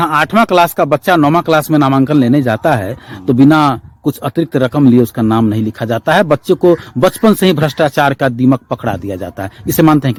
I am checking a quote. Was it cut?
no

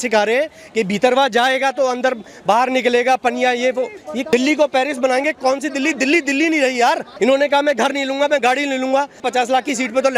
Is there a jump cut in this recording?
yes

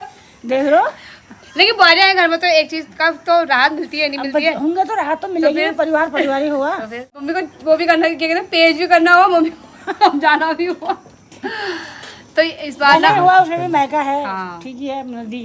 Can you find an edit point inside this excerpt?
no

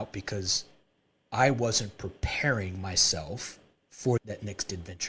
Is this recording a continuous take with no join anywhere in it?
no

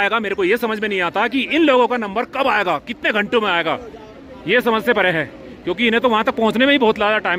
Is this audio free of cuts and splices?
yes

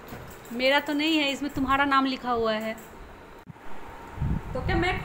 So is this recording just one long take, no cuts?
no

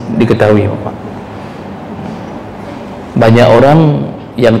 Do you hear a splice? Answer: no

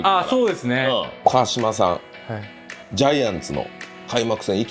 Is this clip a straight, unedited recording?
no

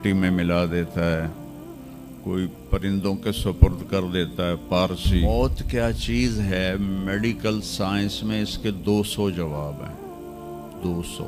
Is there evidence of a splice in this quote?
yes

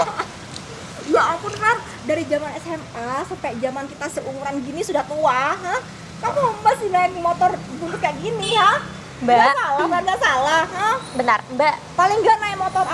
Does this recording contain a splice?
no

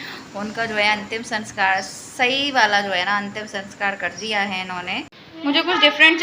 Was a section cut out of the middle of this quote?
yes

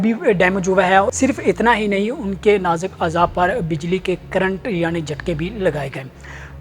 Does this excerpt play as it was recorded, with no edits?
no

